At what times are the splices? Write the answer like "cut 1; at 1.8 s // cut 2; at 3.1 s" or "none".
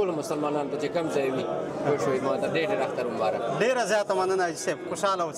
none